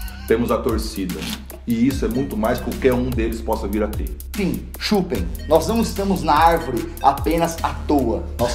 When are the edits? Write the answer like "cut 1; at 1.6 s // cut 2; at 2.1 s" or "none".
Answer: cut 1; at 4.4 s